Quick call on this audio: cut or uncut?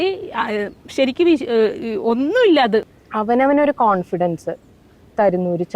cut